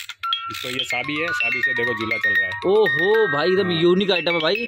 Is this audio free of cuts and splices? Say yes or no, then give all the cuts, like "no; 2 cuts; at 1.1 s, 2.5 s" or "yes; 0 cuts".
yes; 0 cuts